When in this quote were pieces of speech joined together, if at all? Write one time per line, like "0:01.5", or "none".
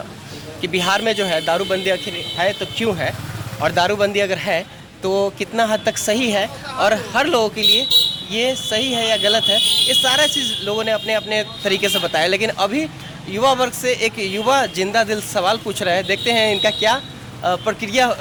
none